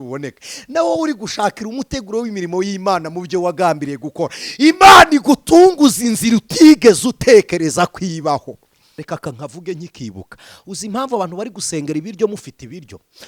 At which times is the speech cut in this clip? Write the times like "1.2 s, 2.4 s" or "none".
9.0 s